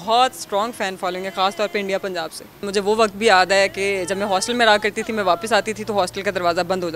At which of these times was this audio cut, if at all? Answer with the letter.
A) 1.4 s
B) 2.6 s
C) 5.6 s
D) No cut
B